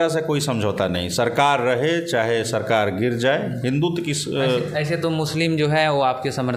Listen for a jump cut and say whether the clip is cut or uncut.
uncut